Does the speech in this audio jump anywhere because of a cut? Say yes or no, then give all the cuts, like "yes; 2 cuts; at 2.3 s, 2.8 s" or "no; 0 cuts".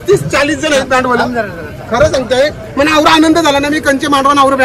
no; 0 cuts